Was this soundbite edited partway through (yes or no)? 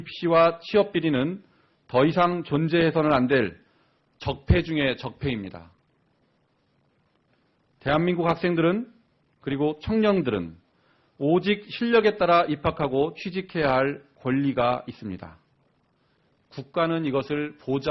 no